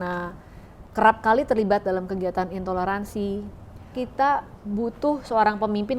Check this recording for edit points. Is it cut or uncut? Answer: cut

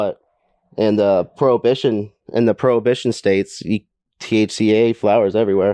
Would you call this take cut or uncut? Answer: uncut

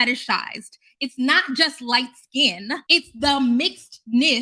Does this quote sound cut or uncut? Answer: cut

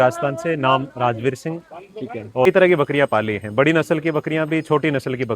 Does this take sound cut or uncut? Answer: cut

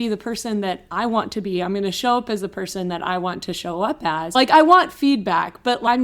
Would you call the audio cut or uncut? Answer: cut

